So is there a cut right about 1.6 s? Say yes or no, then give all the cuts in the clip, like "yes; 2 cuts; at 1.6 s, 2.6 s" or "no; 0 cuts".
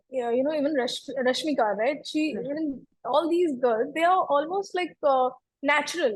no; 0 cuts